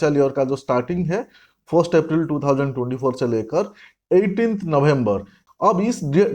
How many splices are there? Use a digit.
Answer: 1